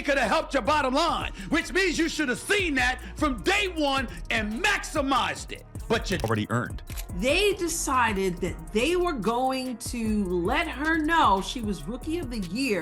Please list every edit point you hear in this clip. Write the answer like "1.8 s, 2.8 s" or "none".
6.1 s

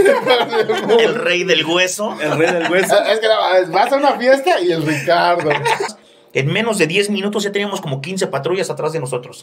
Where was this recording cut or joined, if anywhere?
5.9 s

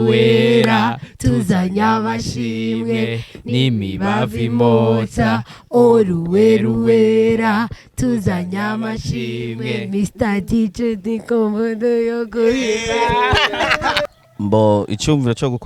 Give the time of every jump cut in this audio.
14.0 s

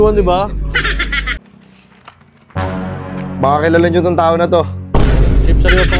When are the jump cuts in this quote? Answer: 1.4 s

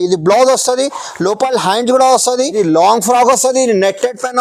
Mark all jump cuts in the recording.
2.5 s

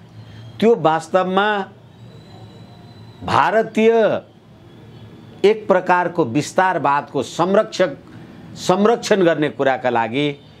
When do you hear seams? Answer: none

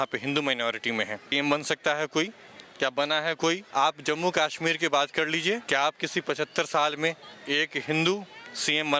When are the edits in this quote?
1.2 s, 3.6 s, 5.6 s

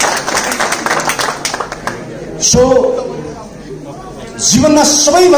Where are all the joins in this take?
none

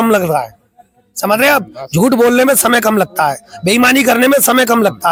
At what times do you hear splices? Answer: none

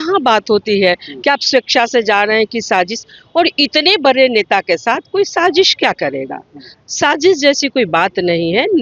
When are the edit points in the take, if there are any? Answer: none

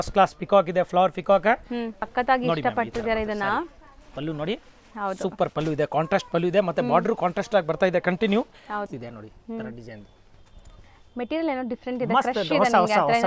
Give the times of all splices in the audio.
2.0 s, 8.9 s

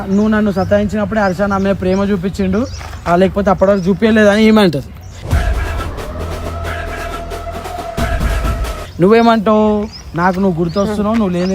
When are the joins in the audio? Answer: none

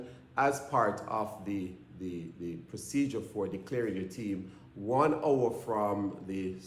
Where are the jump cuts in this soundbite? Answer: none

